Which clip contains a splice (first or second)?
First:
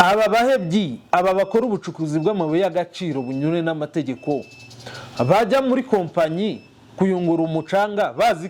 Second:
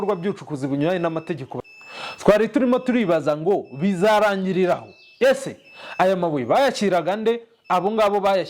second